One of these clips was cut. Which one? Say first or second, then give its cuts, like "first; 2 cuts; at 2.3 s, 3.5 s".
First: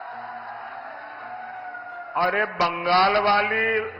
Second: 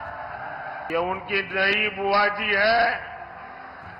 second; 1 cut; at 0.9 s